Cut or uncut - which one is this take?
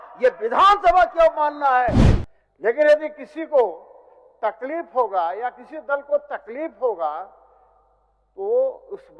cut